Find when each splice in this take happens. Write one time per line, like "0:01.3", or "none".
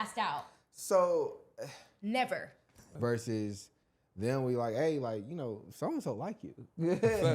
0:02.9

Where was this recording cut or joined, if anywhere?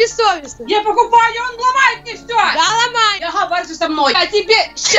0:03.2
0:04.2

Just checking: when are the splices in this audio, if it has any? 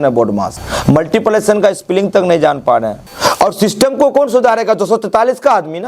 0:03.0

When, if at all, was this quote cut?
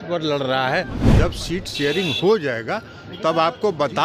0:01.0

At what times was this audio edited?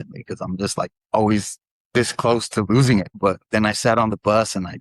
0:03.1

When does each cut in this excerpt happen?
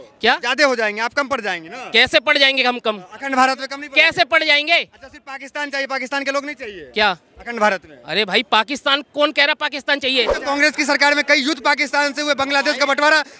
0:10.4

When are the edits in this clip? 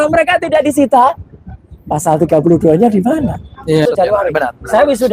0:03.8

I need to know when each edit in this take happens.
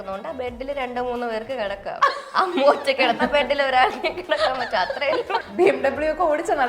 0:05.4

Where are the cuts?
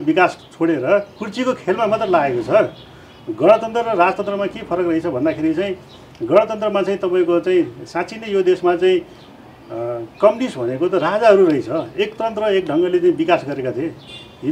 none

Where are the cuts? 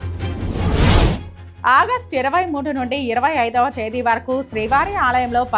0:01.4

